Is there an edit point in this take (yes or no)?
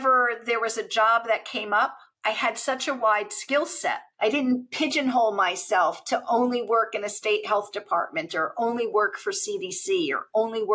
yes